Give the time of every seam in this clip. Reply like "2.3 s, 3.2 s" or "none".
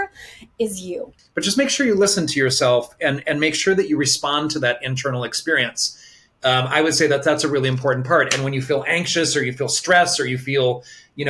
1.2 s

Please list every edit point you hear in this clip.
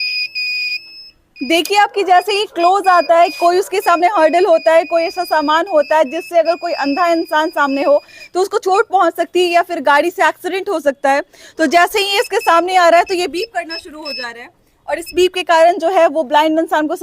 none

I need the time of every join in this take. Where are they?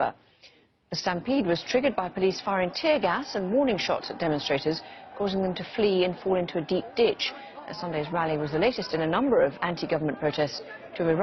none

